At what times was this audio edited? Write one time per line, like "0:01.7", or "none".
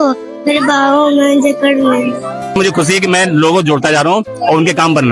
0:02.5